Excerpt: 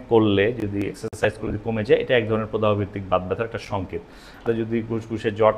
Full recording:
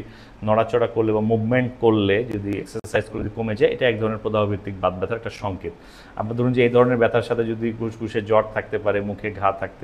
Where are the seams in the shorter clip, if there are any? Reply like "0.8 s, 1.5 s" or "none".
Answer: 4.4 s